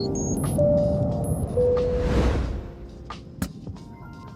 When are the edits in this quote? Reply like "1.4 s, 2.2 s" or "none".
none